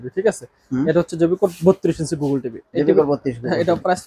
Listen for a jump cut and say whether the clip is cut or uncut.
uncut